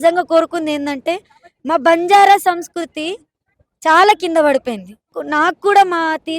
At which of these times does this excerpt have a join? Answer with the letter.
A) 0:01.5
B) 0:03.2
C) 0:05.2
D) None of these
C